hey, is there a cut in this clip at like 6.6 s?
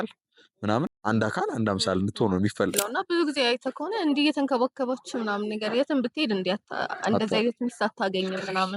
no; 2 cuts; at 0.9 s, 2.8 s

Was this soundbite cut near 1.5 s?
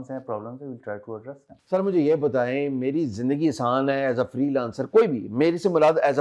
yes; 1 cut; at 1.5 s

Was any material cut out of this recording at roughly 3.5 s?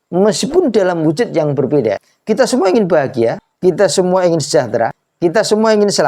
yes; 3 cuts; at 2.1 s, 3.5 s, 5.0 s

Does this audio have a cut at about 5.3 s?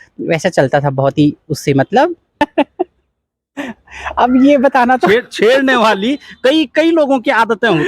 no; 1 cut; at 2.4 s

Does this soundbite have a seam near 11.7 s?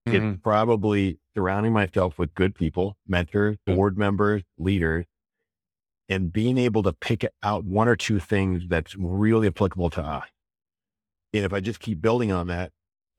no; 2 cuts; at 3.6 s, 7.7 s

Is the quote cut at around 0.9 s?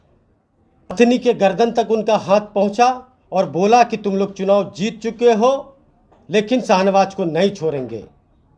yes; 1 cut; at 0.9 s

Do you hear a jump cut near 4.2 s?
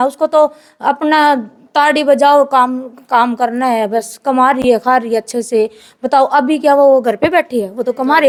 no; 0 cuts

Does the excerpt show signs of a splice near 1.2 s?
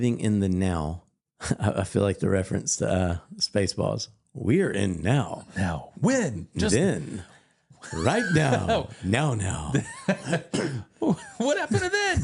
no; 0 cuts

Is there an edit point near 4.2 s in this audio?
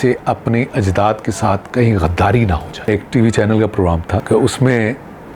yes; 2 cuts; at 2.9 s, 4.2 s

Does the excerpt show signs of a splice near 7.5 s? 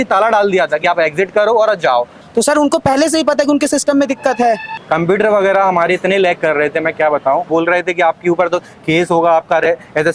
yes; 3 cuts; at 2.2 s, 4.7 s, 7.5 s

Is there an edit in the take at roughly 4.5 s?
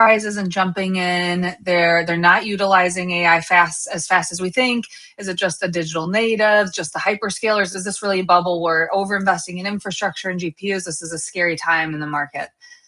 yes; 1 cut; at 4.5 s

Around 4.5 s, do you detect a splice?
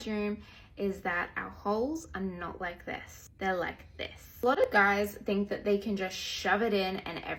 no; 0 cuts

